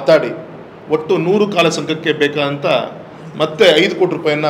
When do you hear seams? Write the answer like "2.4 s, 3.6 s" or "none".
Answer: none